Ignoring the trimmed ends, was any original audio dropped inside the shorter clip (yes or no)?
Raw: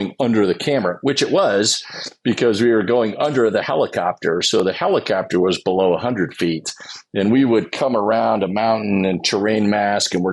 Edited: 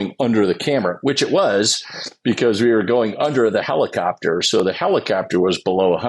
no